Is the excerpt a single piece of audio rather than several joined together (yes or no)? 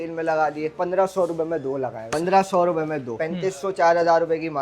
no